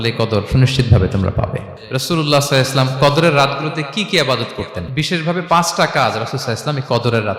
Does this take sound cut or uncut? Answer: cut